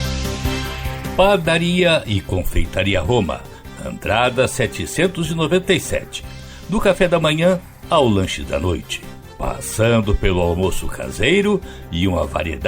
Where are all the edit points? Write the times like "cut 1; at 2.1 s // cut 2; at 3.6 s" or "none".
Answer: cut 1; at 1.0 s